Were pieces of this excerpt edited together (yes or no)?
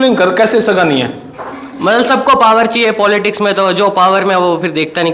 no